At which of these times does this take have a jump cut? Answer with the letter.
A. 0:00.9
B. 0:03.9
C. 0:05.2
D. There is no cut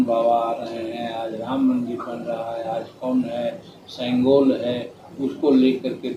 D